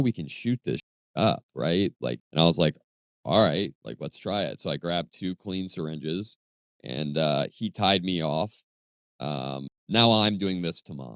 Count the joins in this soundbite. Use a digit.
3